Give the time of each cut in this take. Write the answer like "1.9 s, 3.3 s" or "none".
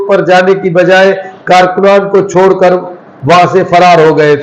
none